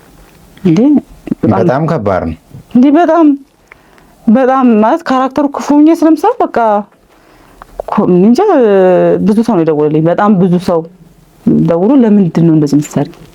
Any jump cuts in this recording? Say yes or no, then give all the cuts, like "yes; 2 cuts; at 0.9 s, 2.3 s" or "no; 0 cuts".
no; 0 cuts